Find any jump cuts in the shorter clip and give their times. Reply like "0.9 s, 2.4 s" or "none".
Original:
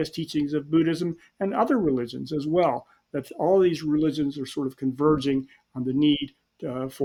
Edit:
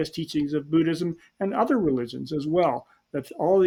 none